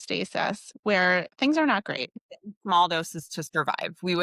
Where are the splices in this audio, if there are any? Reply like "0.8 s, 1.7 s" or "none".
2.1 s